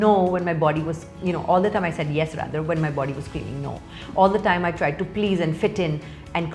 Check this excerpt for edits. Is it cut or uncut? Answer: uncut